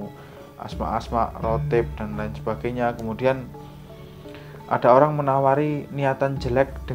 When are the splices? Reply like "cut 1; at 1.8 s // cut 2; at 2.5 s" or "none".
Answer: none